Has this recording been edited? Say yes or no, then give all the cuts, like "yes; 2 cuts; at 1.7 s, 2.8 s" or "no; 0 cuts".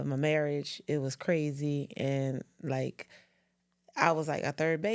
no; 0 cuts